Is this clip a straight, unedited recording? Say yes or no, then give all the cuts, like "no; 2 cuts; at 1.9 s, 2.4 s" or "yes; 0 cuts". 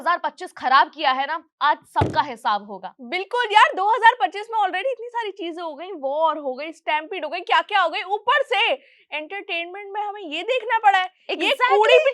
yes; 0 cuts